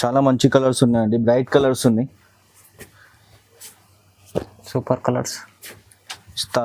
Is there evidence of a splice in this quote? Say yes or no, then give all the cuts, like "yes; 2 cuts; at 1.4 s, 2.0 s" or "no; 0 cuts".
no; 0 cuts